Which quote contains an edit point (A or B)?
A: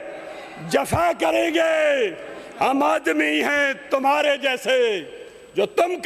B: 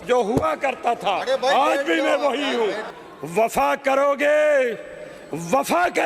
B